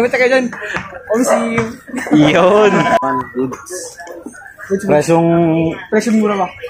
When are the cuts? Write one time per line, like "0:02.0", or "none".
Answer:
0:03.0